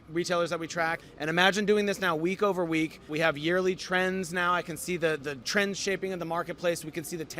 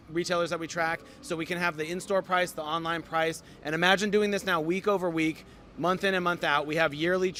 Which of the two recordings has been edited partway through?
first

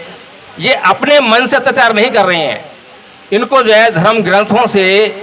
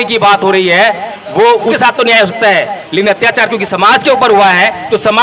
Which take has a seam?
second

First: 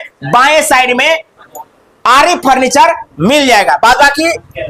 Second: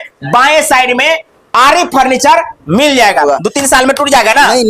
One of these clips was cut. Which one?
second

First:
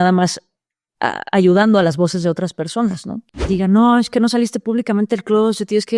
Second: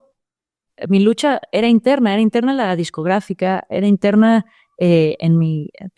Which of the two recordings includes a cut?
first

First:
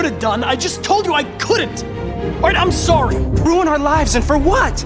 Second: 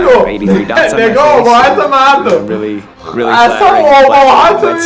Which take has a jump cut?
first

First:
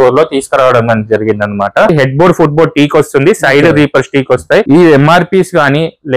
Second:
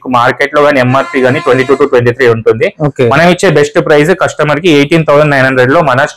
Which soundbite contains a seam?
first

